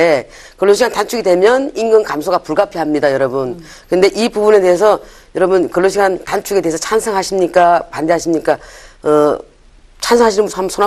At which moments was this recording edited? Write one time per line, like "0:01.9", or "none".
0:08.6